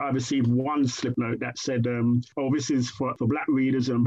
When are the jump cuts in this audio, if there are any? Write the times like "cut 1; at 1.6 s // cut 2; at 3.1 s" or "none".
cut 1; at 1.1 s